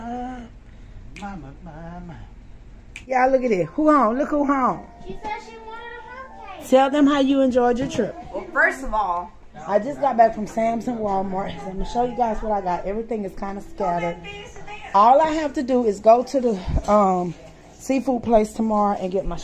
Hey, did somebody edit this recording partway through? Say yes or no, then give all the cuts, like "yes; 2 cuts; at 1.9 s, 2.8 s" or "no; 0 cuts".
yes; 2 cuts; at 3.1 s, 9.5 s